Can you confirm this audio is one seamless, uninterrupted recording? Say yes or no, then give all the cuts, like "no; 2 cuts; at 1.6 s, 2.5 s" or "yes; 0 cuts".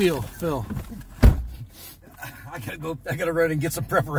yes; 0 cuts